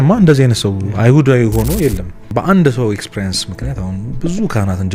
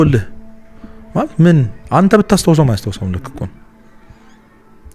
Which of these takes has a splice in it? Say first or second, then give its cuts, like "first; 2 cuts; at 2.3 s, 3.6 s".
first; 1 cut; at 2.1 s